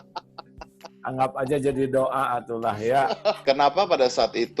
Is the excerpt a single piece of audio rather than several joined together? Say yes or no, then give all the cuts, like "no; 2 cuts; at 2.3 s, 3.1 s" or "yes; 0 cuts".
no; 1 cut; at 3.4 s